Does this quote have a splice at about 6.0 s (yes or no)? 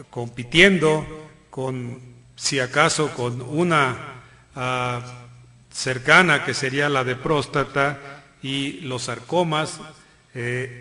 yes